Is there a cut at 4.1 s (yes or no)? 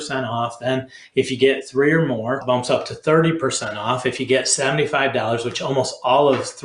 no